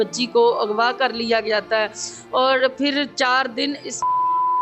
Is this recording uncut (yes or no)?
yes